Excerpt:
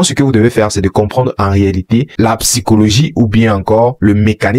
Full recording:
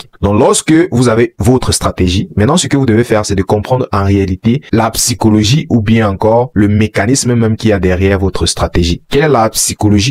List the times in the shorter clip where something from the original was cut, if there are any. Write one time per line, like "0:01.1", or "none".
none